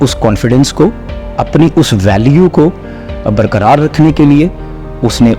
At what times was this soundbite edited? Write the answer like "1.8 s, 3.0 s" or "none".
none